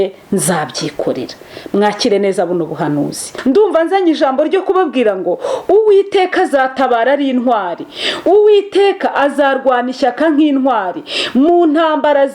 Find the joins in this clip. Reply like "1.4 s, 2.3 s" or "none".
3.3 s